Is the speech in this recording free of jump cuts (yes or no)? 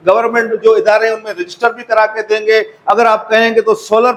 yes